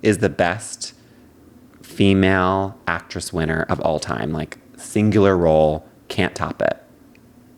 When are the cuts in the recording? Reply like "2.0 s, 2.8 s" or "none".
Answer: none